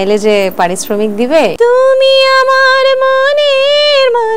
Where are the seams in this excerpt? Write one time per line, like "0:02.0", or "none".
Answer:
0:01.5